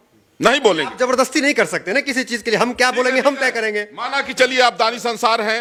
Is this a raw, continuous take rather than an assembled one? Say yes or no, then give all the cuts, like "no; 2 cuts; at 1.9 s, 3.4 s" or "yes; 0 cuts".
yes; 0 cuts